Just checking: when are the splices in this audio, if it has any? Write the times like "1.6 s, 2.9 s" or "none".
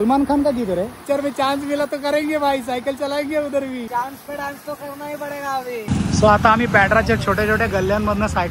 1.0 s, 3.9 s, 5.8 s